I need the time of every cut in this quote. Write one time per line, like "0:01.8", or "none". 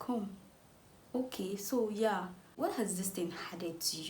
0:02.5